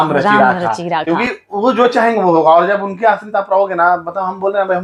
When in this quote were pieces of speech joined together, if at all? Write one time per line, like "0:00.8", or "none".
none